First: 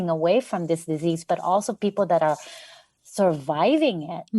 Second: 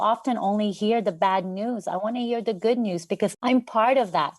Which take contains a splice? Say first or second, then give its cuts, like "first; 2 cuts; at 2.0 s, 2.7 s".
second; 1 cut; at 3.4 s